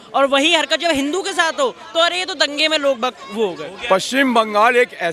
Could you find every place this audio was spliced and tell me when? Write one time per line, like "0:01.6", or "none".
0:03.7